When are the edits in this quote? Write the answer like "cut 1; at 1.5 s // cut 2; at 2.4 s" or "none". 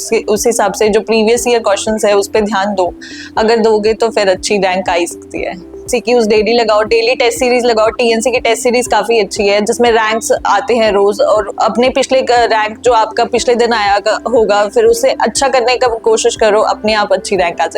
cut 1; at 5.8 s